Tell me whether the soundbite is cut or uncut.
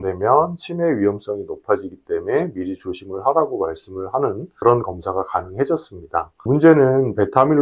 cut